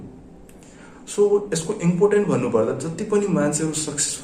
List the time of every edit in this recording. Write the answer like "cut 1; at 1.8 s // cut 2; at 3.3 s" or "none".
none